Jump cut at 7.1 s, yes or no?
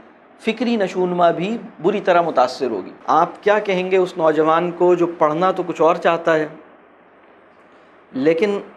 no